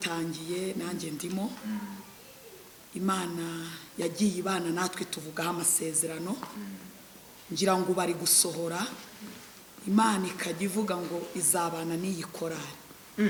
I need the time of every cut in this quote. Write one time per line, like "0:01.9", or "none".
none